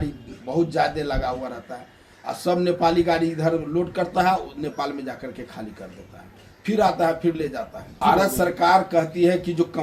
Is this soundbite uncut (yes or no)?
no